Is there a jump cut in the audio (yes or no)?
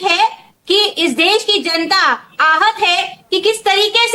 no